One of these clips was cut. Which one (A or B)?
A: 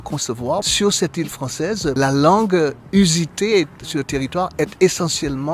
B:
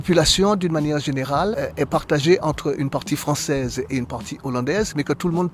A